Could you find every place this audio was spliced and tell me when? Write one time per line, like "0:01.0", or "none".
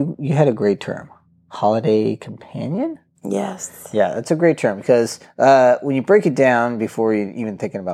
0:05.2